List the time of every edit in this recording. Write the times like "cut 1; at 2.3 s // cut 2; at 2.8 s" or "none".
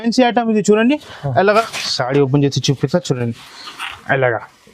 cut 1; at 1.6 s